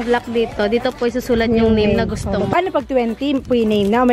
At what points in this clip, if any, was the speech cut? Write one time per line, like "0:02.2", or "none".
0:02.5